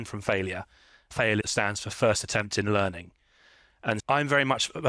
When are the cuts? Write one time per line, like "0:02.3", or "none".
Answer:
0:01.1